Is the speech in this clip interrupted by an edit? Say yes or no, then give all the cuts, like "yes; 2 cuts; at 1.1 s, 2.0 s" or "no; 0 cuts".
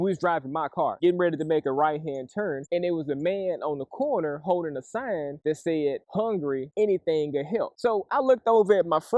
yes; 1 cut; at 1.0 s